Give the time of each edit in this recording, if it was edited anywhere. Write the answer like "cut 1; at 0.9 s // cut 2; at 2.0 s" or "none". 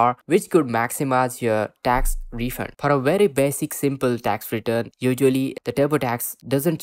cut 1; at 2.7 s // cut 2; at 4.9 s // cut 3; at 5.6 s